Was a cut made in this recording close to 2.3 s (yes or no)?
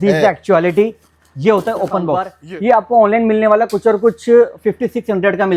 yes